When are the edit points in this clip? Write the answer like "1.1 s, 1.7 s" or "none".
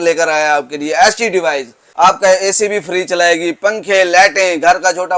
1.8 s